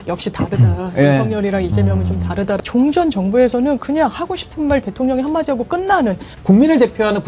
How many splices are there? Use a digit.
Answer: 2